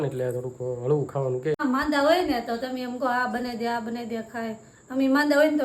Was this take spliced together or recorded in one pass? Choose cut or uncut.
cut